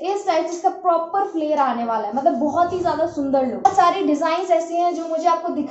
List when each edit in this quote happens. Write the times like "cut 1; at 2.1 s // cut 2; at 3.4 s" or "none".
cut 1; at 3.6 s